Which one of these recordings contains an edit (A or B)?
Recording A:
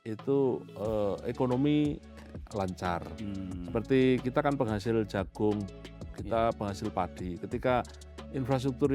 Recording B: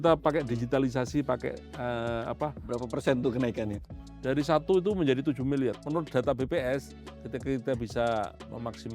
B